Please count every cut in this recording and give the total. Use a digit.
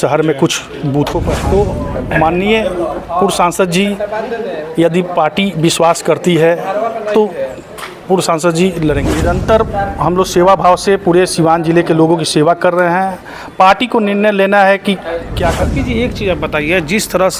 3